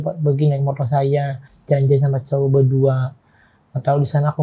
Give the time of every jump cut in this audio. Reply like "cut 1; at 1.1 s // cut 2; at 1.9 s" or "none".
none